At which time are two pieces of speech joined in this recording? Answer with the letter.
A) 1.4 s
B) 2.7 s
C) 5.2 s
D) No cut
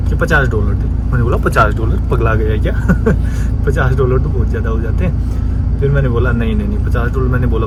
D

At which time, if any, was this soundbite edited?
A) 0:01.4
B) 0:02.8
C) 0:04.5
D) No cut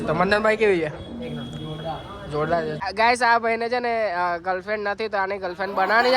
B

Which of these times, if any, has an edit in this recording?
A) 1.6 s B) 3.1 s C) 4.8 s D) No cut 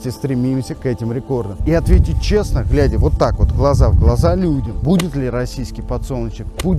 A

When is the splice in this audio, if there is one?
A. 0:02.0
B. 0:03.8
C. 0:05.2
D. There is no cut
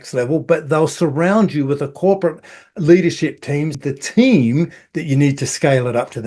B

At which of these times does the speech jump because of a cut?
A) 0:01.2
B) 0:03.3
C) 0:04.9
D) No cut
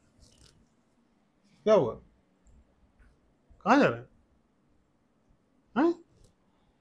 D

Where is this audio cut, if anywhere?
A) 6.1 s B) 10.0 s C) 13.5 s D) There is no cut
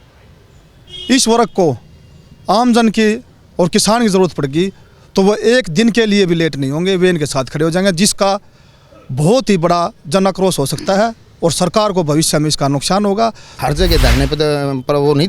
C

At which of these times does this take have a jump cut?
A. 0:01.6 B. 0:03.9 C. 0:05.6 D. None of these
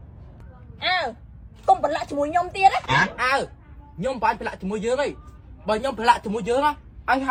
D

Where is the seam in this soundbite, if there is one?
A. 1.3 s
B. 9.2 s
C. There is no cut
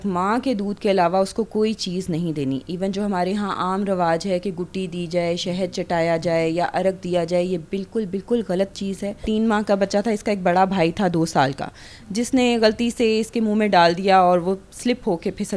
B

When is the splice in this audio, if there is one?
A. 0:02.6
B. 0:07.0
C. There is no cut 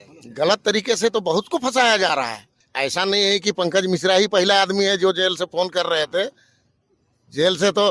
A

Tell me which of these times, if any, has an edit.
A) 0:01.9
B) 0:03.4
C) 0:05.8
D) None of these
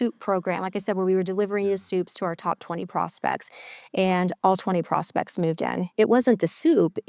C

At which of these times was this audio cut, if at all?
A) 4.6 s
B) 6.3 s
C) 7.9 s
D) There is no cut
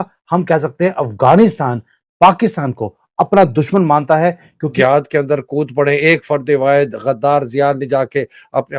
A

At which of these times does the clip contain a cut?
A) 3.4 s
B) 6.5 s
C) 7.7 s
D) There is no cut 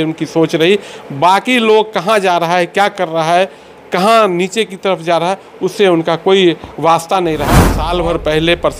C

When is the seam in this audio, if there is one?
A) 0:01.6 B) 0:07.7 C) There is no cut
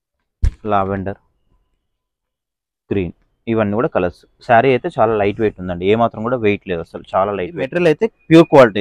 B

